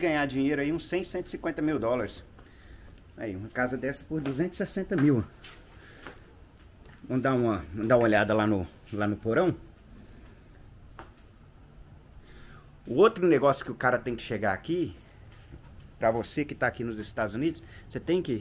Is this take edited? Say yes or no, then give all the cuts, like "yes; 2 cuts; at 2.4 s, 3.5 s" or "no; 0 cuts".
no; 0 cuts